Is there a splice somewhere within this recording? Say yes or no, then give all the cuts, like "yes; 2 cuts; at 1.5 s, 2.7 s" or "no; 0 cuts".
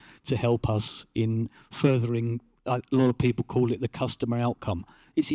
no; 0 cuts